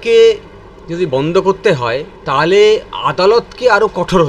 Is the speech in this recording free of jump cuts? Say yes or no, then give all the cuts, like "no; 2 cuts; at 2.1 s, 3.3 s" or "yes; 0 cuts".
no; 1 cut; at 2.1 s